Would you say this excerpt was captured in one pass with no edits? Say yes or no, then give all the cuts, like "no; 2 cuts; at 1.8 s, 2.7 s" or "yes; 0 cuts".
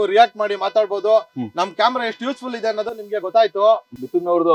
yes; 0 cuts